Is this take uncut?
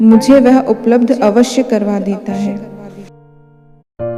no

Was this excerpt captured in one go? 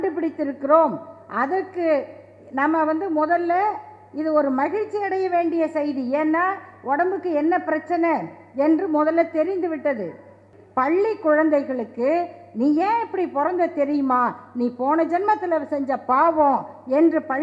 no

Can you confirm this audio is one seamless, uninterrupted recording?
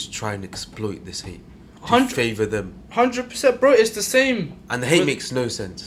yes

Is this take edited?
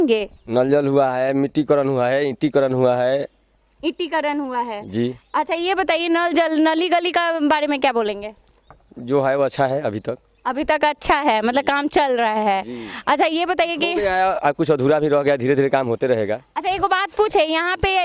no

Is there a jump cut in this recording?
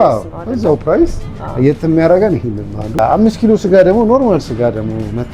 yes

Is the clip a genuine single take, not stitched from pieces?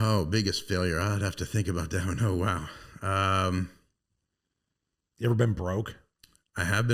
yes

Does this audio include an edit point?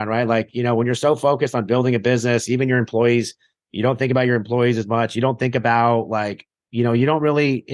no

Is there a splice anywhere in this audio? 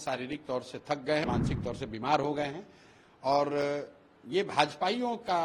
yes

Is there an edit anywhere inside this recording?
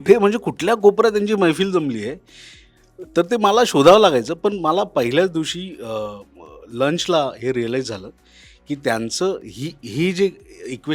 no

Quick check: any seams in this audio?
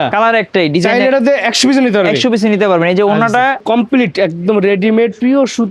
yes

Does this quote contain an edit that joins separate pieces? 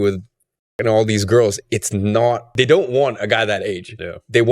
yes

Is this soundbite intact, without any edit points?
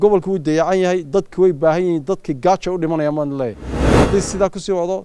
no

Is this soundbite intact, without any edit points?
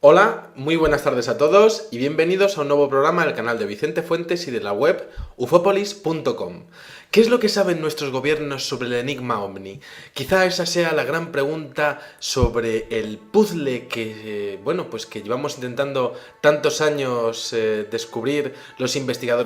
yes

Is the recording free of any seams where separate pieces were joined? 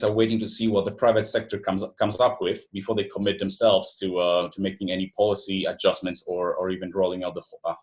yes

